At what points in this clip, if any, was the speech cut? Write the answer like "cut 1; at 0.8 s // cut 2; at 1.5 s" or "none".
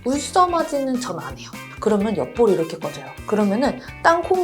cut 1; at 1.6 s